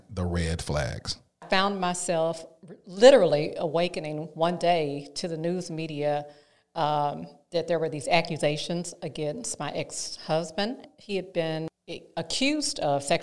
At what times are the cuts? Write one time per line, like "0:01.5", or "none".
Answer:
0:01.4
0:10.9
0:11.7